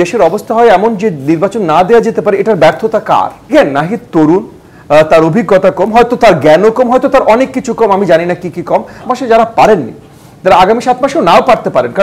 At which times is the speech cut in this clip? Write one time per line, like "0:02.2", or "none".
0:03.5
0:09.1